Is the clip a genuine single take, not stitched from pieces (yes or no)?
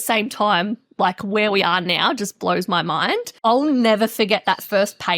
no